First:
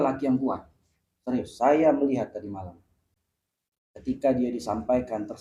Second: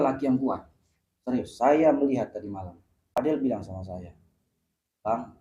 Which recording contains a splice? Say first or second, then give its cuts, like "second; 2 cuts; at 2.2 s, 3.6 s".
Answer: second; 1 cut; at 2.9 s